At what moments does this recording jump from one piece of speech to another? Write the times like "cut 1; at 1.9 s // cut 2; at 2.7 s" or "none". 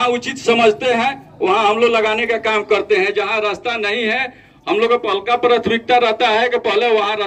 none

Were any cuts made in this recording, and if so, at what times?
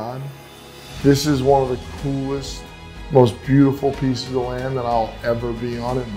none

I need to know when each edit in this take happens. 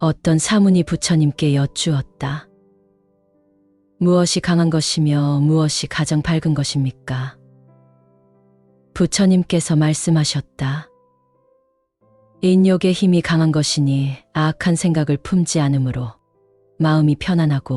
cut 1; at 7.4 s // cut 2; at 8.9 s

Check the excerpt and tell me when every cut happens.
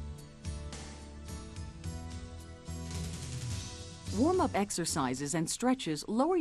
cut 1; at 4.1 s

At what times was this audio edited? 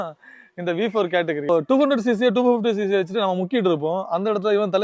cut 1; at 1.5 s

